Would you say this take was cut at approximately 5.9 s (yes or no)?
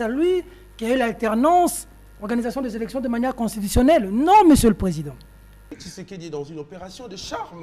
yes